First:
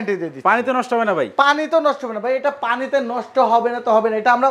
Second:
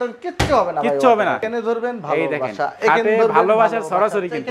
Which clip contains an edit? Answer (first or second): second